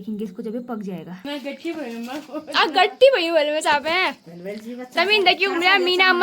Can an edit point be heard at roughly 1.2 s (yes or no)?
yes